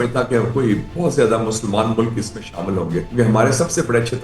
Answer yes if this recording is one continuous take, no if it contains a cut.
no